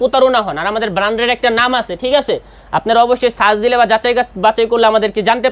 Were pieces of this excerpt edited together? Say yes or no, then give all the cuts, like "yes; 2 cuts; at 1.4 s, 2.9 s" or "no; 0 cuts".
no; 0 cuts